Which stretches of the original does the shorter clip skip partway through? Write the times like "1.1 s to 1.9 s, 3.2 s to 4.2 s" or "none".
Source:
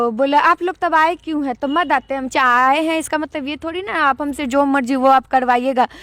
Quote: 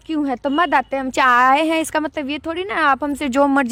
none